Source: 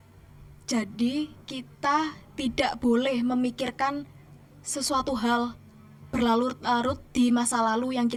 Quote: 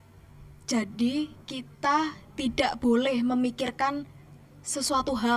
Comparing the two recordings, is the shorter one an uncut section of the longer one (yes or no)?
yes